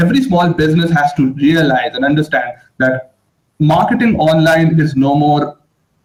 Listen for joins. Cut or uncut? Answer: uncut